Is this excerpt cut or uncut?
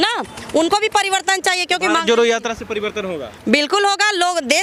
uncut